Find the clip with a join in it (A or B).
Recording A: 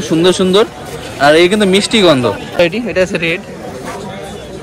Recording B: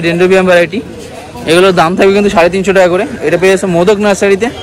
A